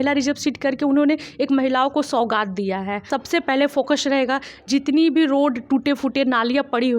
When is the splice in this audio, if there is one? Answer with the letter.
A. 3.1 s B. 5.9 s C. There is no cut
A